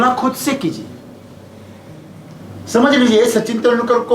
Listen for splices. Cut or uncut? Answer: cut